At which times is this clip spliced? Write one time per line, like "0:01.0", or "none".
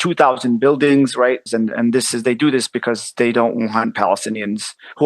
0:01.5